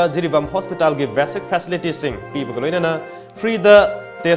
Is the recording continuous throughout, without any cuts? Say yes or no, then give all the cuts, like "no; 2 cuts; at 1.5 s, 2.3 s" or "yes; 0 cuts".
yes; 0 cuts